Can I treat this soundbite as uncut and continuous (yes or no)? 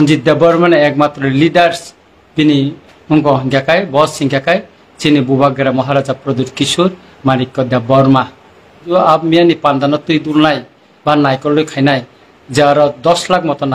no